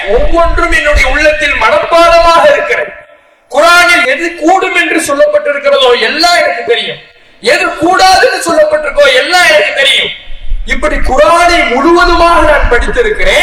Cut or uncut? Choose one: uncut